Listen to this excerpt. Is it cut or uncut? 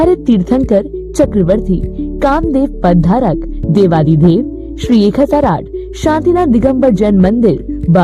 uncut